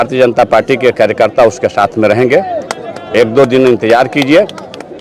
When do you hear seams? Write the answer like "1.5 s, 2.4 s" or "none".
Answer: none